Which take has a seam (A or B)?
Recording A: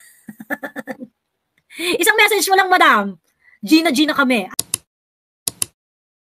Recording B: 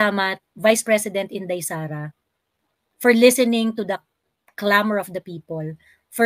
A